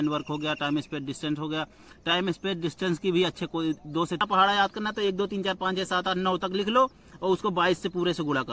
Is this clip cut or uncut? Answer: cut